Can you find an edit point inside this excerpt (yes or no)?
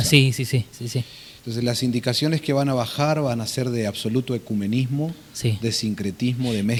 no